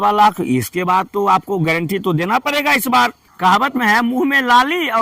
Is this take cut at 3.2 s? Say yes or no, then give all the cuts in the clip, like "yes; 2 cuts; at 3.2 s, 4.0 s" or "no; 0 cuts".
yes; 1 cut; at 3.2 s